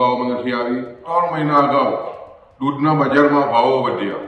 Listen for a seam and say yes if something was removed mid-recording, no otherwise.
yes